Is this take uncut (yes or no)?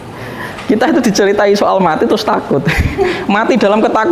yes